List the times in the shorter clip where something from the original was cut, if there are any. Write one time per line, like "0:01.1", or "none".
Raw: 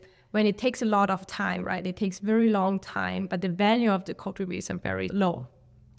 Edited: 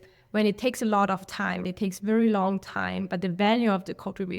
0:01.6